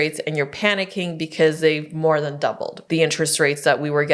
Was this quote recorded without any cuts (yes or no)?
no